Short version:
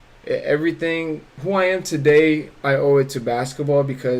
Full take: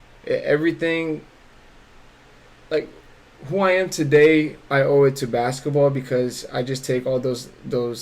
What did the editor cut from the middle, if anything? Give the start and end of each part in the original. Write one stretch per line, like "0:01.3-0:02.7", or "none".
0:01.3-0:03.4